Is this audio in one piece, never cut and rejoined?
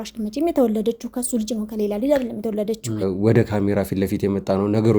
no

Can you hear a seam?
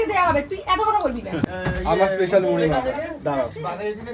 yes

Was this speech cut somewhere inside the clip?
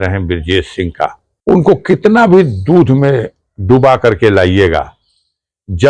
yes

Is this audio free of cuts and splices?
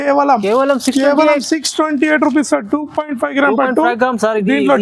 yes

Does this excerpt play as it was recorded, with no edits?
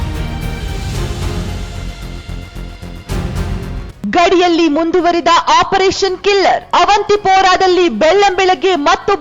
no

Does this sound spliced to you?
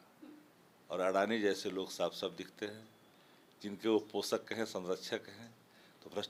no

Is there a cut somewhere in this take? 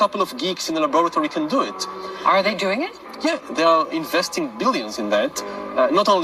no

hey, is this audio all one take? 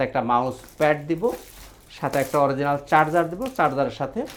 yes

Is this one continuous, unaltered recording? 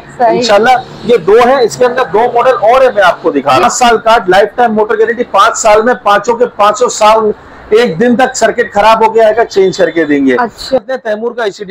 no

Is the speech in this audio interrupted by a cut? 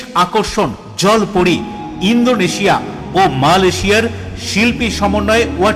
no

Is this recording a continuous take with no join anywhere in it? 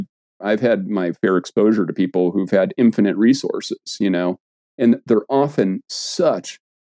yes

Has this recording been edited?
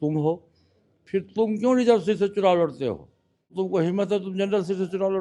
yes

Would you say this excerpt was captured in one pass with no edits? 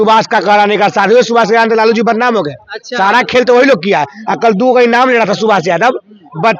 yes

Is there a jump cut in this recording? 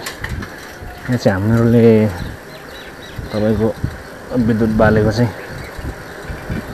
no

